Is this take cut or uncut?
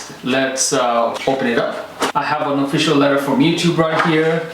cut